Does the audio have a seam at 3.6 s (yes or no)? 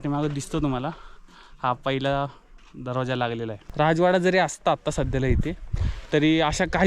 yes